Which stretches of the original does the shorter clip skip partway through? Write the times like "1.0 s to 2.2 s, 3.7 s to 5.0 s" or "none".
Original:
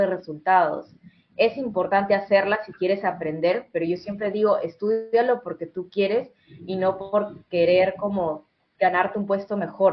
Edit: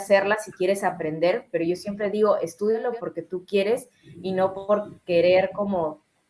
5.1 s to 5.3 s

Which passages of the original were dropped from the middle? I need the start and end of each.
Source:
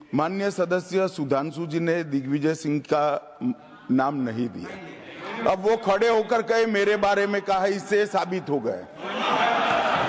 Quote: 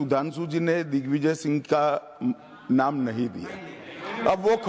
none

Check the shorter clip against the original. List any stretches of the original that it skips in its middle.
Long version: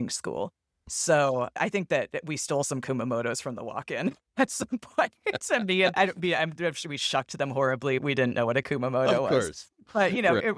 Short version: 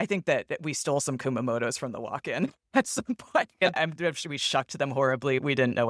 5.3 s to 6.2 s

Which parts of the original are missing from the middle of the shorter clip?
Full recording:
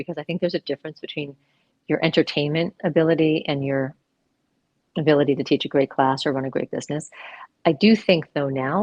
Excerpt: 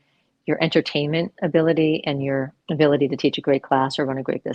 4.0 s to 4.9 s

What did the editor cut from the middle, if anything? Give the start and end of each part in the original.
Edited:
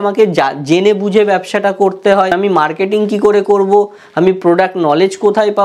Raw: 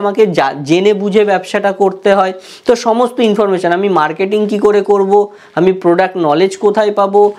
2.3 s to 3.7 s

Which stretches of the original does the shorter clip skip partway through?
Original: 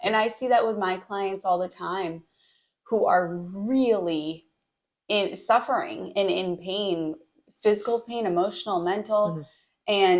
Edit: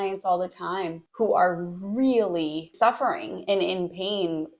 2.2 s to 2.7 s, 4.4 s to 5.4 s

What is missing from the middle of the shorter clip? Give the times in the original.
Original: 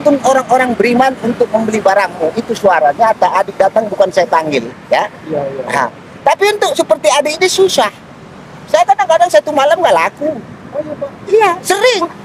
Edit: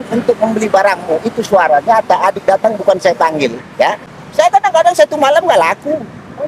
5.2 s to 8.4 s

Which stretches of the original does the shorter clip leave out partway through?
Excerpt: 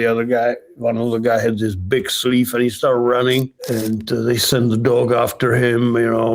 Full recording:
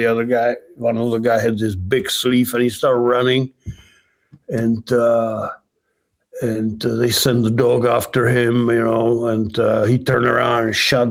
3.6 s to 6.3 s

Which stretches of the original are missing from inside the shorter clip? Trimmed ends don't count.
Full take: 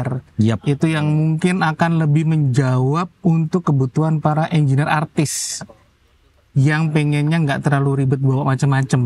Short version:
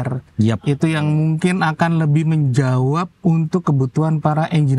none

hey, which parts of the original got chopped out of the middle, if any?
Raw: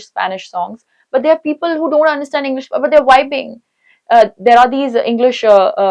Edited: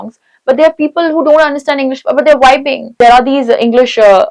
3.5 s to 4.3 s

